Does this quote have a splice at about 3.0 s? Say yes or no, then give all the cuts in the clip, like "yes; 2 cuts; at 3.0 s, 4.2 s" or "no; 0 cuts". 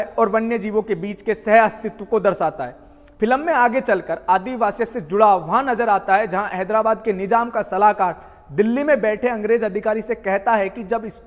no; 0 cuts